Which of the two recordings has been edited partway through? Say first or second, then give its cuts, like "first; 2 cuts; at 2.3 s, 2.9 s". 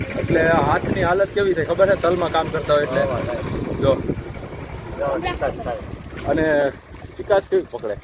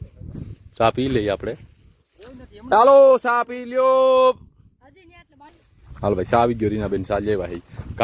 second; 1 cut; at 5.5 s